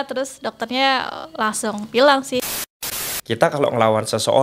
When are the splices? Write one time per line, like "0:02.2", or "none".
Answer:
0:02.8